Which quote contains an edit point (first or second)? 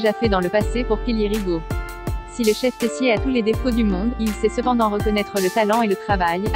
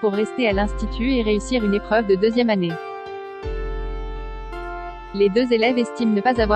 second